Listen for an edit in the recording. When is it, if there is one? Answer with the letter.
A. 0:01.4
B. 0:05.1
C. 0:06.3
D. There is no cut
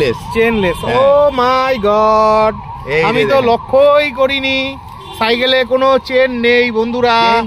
D